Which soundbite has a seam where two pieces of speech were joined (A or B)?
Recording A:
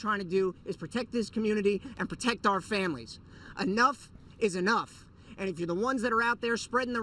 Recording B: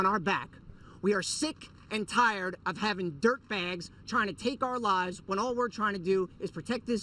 A